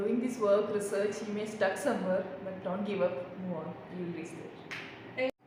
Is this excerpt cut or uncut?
uncut